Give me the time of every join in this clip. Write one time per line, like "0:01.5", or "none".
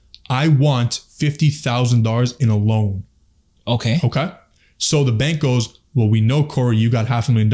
none